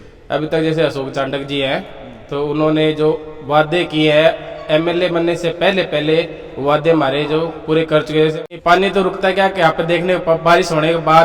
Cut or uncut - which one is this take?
cut